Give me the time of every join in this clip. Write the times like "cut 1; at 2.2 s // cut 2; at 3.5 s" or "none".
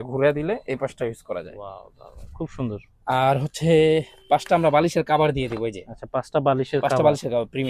none

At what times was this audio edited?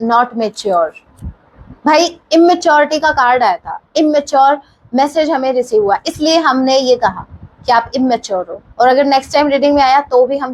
none

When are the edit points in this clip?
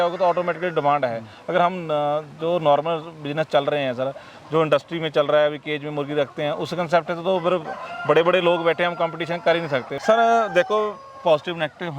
cut 1; at 9.9 s

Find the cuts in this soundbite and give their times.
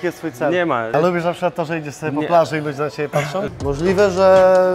cut 1; at 0.9 s // cut 2; at 3.5 s

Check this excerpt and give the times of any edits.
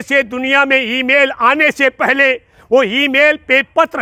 none

